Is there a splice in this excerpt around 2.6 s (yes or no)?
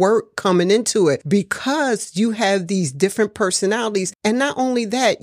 no